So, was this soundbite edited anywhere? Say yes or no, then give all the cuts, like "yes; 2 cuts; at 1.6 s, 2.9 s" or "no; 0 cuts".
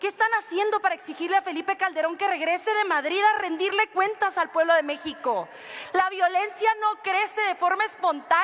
no; 0 cuts